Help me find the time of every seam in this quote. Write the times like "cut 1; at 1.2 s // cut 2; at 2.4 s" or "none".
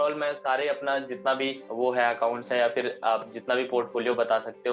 none

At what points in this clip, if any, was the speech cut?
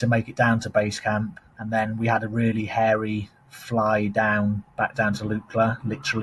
none

